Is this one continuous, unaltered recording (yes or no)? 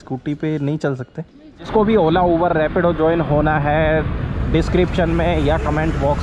no